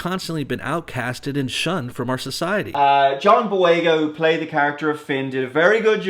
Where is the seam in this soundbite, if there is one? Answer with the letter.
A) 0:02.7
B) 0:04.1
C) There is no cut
A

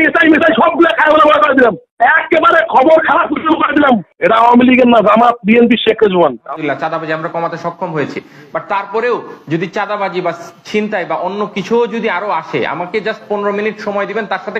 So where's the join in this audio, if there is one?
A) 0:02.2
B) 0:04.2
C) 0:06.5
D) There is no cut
C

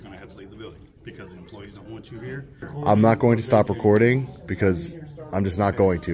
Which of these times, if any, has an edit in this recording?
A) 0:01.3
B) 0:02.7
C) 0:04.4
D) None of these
B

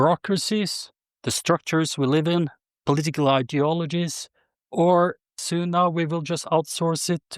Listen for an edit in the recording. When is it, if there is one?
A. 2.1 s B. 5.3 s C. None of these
B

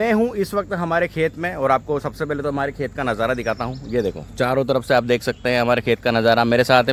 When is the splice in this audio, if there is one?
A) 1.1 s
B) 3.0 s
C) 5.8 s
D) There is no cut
D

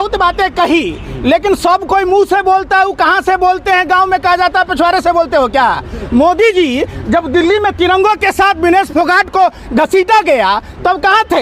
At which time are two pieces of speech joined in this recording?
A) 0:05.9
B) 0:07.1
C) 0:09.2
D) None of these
D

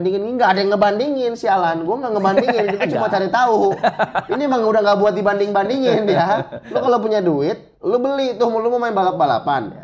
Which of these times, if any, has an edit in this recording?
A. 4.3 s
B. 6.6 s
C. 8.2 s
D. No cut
B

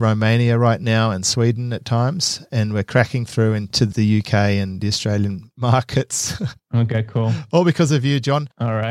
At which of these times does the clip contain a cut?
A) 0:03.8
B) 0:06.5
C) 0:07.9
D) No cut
A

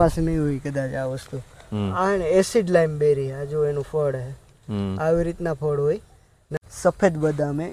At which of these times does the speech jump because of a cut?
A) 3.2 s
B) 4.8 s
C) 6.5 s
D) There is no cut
C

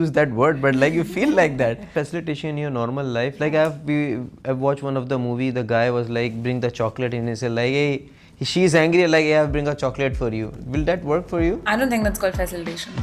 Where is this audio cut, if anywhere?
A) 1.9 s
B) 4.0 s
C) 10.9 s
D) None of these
A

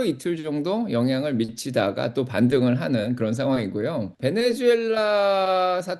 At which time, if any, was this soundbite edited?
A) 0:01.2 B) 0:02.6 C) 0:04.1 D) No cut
C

